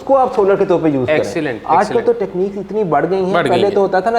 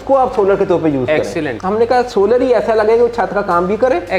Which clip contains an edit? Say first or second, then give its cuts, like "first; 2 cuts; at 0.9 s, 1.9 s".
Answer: second; 1 cut; at 1.5 s